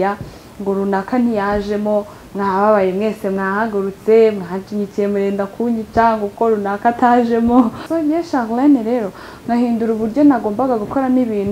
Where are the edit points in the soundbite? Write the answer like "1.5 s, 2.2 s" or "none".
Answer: 7.8 s